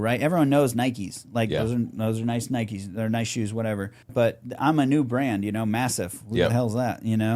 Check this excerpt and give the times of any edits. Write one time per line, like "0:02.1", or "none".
0:04.1